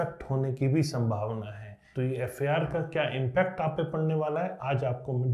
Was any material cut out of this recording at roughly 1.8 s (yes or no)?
yes